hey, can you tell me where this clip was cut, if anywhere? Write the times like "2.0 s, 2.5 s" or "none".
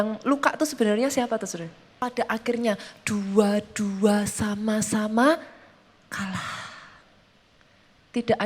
2.0 s